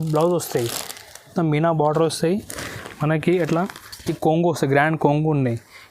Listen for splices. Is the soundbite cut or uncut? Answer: cut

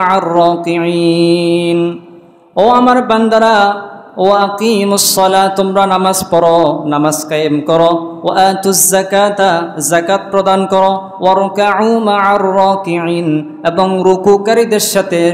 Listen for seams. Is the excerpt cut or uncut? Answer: uncut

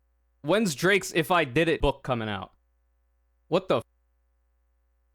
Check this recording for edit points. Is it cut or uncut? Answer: cut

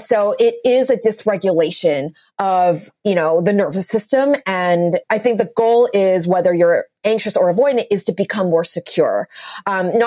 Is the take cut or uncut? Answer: cut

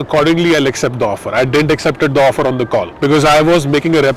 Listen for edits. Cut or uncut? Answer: uncut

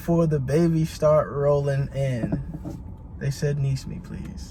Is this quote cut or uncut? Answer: uncut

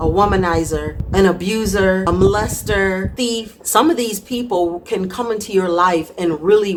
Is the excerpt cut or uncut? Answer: uncut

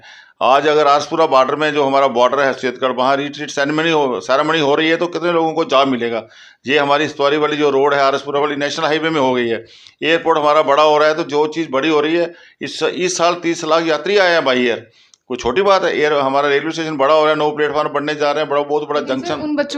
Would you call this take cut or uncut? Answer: uncut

